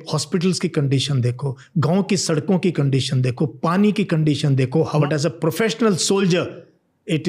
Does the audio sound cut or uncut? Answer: cut